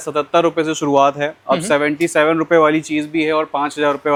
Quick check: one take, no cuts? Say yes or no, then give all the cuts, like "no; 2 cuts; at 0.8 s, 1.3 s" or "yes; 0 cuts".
yes; 0 cuts